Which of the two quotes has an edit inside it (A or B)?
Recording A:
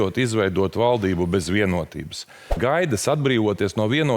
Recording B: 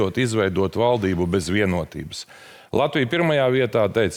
A